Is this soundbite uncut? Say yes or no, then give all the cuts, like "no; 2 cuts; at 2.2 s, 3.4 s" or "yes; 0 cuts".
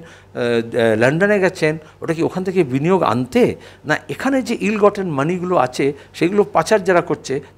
yes; 0 cuts